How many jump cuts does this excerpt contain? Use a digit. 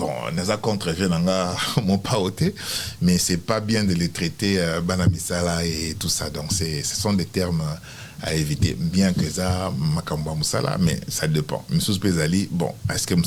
0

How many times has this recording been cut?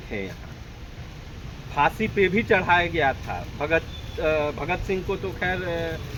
0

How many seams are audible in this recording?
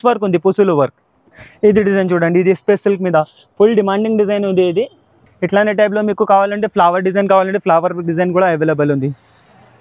0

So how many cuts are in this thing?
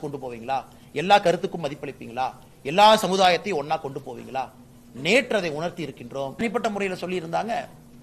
1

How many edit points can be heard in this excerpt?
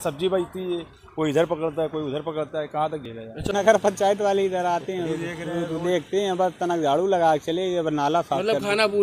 1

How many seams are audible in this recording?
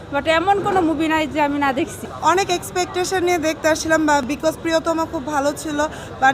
1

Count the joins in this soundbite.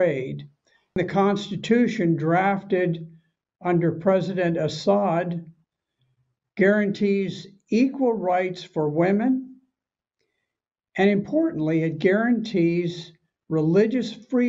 1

